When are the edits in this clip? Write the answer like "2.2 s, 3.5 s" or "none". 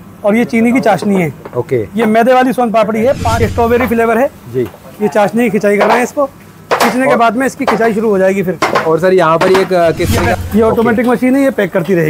3.4 s, 10.4 s